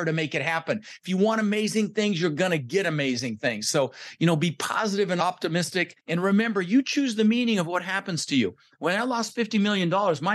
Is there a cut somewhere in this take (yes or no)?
yes